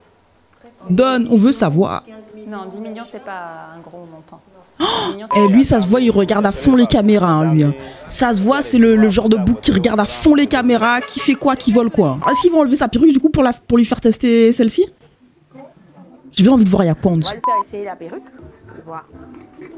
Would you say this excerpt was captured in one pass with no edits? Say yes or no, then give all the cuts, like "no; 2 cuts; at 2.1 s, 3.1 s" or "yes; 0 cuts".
no; 2 cuts; at 5.3 s, 12.3 s